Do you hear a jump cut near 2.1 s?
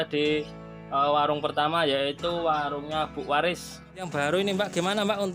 no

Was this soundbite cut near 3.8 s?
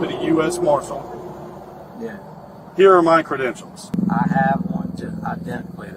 yes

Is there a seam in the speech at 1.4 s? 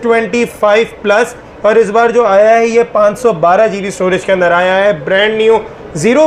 no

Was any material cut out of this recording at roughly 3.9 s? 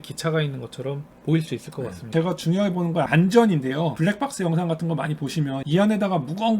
yes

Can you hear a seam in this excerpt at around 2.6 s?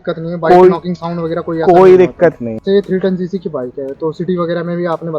yes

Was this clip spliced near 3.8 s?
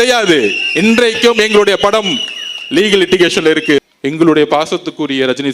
yes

